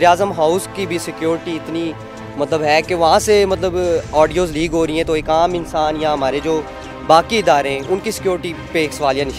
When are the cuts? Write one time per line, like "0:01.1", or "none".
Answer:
none